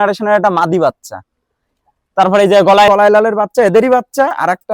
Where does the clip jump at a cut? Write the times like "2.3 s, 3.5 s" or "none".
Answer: 2.9 s